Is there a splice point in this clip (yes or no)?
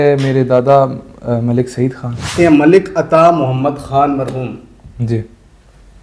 yes